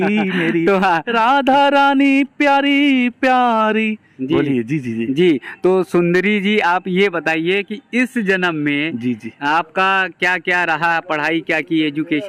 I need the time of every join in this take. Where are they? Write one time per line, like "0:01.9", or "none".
none